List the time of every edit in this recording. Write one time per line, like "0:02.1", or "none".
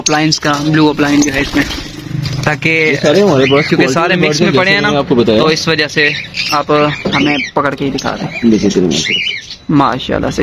none